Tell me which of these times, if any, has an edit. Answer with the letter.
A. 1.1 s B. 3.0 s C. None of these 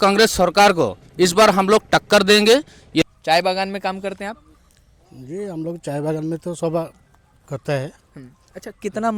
B